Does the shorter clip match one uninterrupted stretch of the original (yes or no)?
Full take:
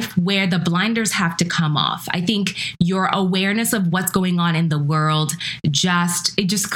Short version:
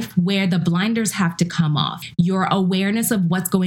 no